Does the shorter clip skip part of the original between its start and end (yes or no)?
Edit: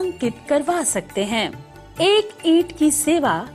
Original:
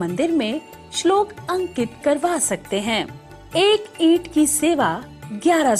no